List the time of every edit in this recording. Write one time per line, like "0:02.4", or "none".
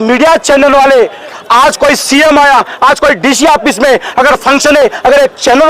0:01.4